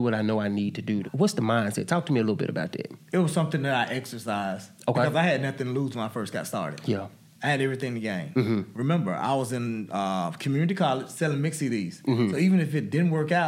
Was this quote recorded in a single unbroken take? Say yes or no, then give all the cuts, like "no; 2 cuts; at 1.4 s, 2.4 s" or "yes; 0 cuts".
no; 1 cut; at 1.1 s